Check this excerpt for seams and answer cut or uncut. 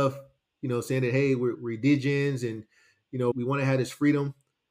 cut